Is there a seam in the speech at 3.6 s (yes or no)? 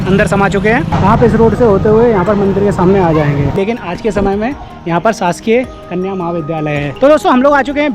yes